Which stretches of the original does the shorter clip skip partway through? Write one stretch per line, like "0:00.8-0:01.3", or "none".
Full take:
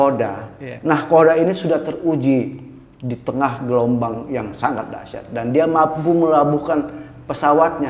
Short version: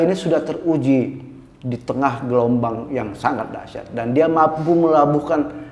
none